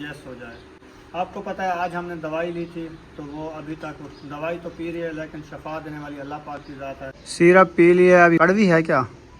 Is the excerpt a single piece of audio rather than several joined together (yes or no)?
no